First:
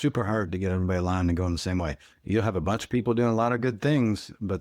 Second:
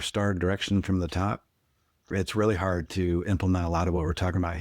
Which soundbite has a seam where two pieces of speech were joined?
second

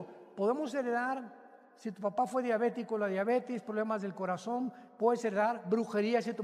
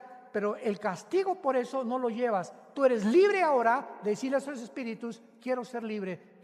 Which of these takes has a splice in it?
second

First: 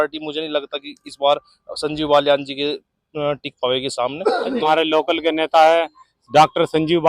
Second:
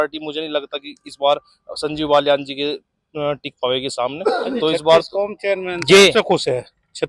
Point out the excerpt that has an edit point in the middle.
first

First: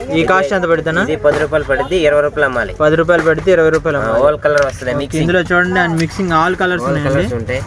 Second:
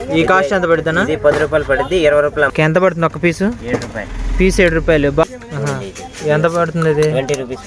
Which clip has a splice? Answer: second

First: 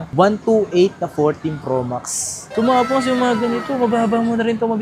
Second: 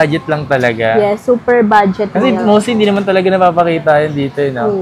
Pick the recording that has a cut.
first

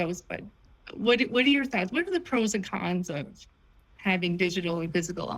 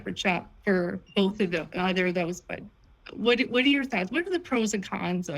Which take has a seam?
second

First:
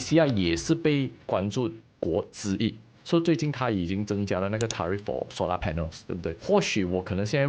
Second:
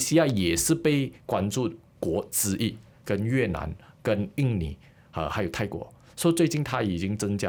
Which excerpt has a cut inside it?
first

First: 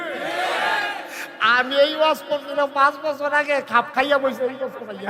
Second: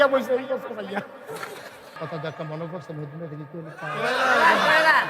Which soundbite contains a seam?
second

